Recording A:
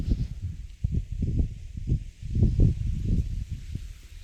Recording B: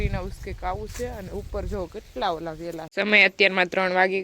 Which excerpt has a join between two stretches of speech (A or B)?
B